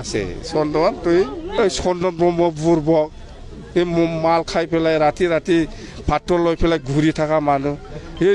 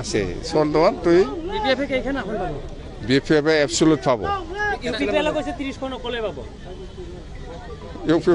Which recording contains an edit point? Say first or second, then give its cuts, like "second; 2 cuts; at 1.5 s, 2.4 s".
first; 1 cut; at 1.5 s